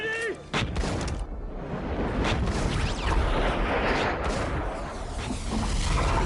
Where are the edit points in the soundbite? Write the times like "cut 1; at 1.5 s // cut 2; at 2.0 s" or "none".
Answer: none